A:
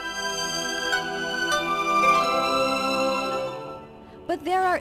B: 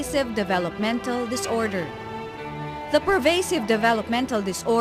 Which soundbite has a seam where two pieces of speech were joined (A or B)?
B